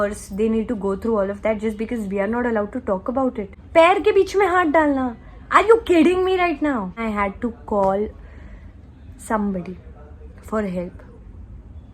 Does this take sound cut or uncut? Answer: cut